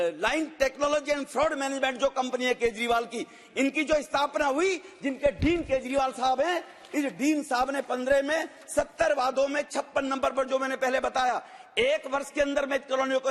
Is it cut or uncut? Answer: uncut